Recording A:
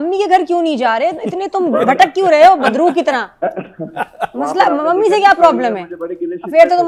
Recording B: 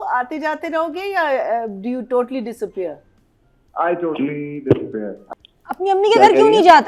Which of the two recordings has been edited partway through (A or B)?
B